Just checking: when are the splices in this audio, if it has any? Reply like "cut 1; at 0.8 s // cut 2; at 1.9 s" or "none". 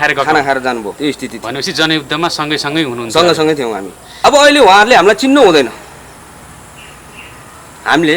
cut 1; at 0.9 s // cut 2; at 4.0 s